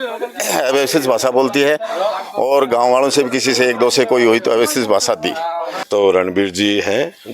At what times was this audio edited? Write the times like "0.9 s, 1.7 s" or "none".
5.8 s